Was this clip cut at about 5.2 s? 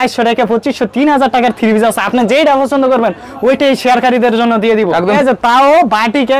yes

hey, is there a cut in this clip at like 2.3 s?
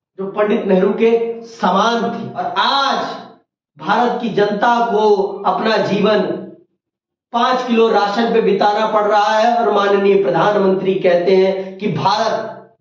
yes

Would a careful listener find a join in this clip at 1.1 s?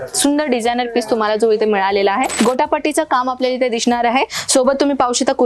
no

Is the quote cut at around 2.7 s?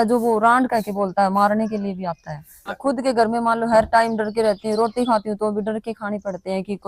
yes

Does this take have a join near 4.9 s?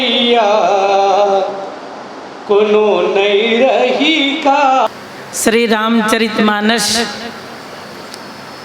yes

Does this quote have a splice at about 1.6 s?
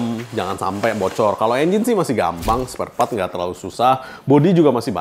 no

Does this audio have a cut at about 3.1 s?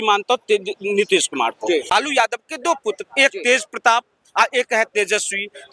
no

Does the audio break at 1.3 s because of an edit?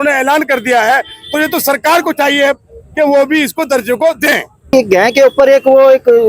no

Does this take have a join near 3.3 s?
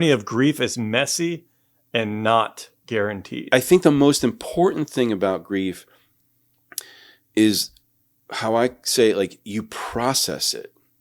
yes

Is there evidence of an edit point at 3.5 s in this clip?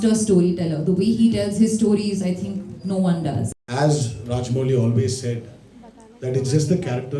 yes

